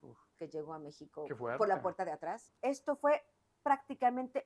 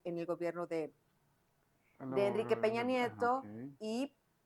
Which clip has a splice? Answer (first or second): first